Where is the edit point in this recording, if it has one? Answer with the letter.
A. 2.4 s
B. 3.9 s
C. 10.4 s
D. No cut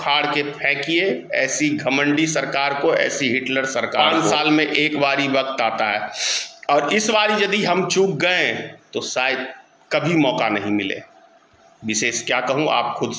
B